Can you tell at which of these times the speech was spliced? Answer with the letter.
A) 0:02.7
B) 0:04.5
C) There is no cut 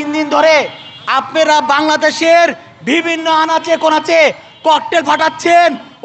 C